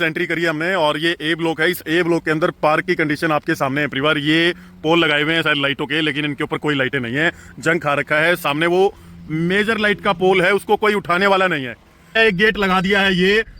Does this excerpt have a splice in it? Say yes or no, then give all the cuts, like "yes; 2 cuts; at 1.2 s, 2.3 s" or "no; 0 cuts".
yes; 1 cut; at 11.9 s